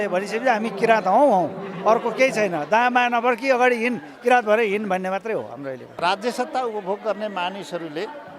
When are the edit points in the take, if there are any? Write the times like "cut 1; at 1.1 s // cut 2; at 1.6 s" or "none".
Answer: cut 1; at 5.9 s